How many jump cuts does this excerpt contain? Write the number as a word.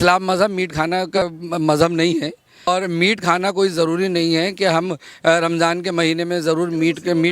two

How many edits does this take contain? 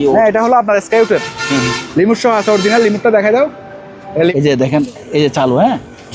one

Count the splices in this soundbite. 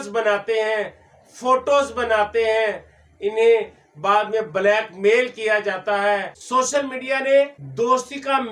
two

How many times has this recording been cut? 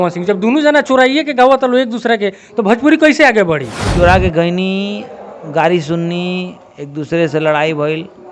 one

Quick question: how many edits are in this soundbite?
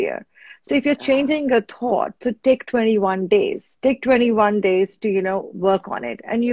one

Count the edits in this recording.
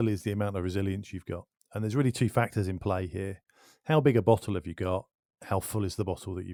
zero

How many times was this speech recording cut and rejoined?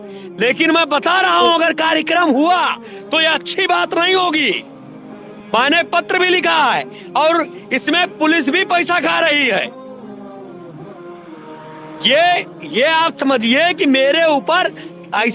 two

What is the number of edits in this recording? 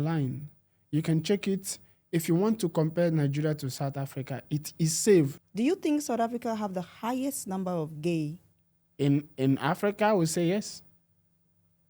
one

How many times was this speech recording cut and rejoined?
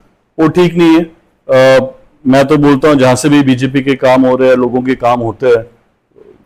zero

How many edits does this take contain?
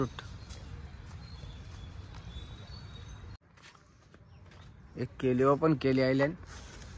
one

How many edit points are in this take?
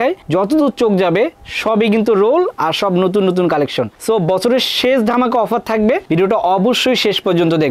zero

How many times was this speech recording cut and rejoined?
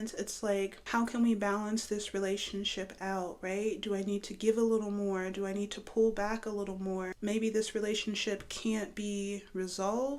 two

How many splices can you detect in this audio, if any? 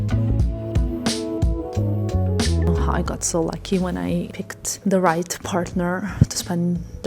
one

